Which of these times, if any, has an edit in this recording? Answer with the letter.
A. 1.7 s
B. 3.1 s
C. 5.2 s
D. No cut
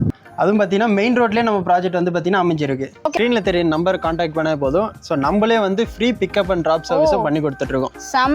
B